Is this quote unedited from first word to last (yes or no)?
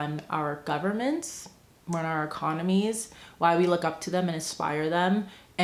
yes